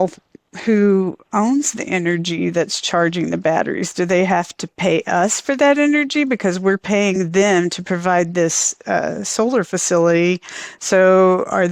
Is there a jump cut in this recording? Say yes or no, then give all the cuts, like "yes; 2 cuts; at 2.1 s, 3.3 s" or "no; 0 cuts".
no; 0 cuts